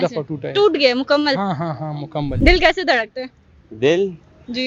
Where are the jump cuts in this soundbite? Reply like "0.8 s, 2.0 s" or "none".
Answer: 2.3 s